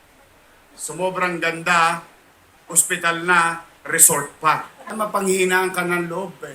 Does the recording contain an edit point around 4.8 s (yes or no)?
yes